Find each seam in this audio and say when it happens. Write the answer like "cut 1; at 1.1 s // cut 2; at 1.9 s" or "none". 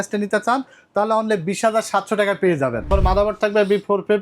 cut 1; at 2.9 s